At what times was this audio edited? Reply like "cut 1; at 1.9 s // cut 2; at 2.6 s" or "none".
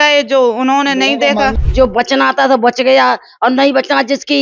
cut 1; at 1.5 s